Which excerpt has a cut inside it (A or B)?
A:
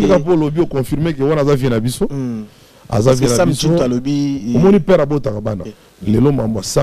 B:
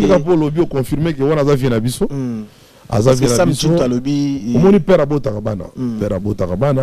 A